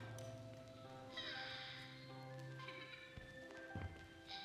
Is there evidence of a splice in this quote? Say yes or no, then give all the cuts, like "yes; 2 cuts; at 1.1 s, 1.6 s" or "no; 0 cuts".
no; 0 cuts